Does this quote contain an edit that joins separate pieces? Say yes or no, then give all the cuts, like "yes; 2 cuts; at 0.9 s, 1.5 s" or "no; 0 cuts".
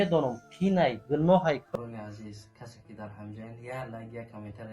yes; 1 cut; at 1.6 s